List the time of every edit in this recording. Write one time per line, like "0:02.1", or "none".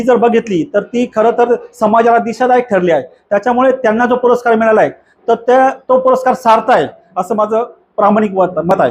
none